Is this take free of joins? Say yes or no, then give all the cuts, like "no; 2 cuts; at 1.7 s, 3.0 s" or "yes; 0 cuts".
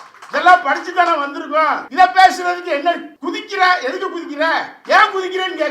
no; 3 cuts; at 1.8 s, 3.1 s, 4.7 s